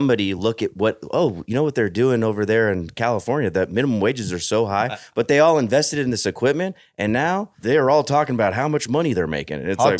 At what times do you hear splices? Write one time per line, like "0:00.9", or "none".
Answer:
0:07.5